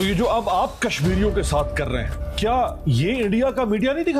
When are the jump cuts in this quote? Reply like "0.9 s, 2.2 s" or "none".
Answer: 2.2 s